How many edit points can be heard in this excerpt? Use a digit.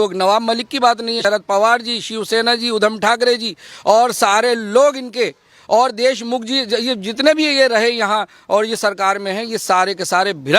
1